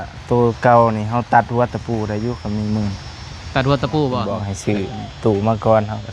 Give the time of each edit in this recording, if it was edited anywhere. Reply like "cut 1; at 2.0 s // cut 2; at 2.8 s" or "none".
cut 1; at 4.2 s